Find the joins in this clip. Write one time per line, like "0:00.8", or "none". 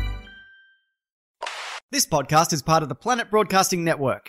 0:01.2